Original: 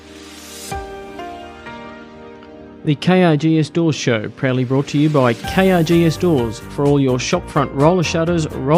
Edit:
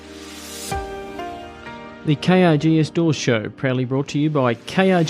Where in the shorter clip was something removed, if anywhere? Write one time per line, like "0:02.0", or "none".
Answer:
0:02.0